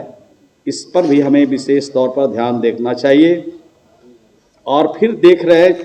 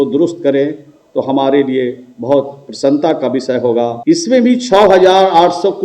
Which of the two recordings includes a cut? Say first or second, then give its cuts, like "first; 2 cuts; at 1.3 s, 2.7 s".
second; 1 cut; at 4.0 s